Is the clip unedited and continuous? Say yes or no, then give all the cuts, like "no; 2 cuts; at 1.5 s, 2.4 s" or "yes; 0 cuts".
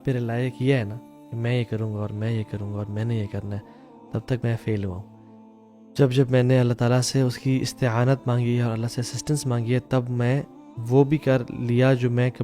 yes; 0 cuts